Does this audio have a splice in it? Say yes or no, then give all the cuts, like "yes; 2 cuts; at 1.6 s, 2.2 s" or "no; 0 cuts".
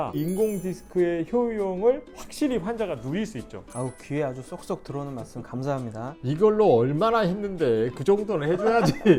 no; 0 cuts